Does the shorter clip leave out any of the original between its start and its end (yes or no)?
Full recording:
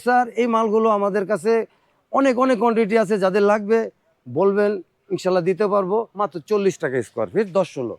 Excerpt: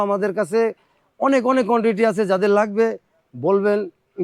no